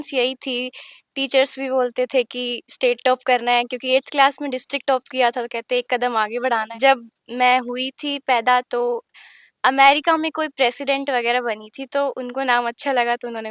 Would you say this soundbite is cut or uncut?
cut